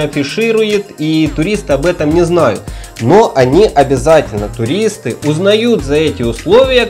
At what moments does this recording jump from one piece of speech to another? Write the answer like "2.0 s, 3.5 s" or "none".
none